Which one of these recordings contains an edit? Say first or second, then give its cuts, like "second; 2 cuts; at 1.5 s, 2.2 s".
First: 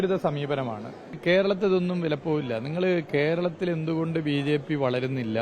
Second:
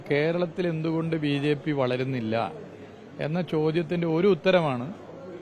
first; 1 cut; at 1.2 s